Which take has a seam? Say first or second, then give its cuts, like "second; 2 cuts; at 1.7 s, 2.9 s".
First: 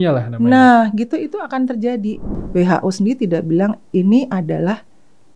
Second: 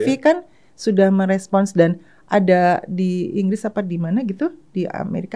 first; 1 cut; at 2.3 s